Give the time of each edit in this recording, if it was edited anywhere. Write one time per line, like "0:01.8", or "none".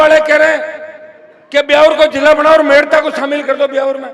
none